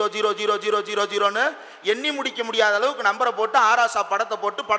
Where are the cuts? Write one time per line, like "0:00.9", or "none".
none